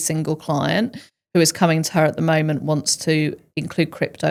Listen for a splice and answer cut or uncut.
uncut